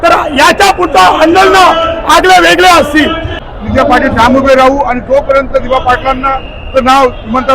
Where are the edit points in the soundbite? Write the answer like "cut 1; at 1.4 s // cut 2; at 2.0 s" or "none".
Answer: cut 1; at 3.4 s